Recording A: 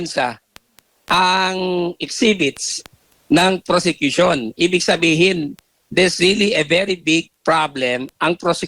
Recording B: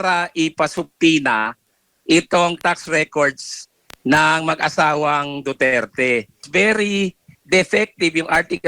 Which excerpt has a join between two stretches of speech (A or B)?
B